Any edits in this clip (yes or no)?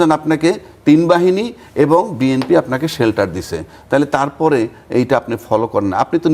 no